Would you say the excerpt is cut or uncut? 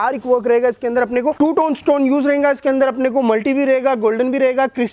uncut